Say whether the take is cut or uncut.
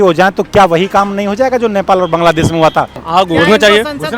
cut